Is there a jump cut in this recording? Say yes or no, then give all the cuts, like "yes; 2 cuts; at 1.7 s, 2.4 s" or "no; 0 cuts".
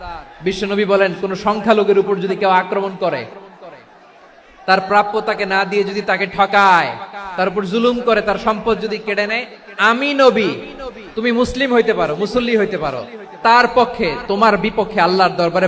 no; 0 cuts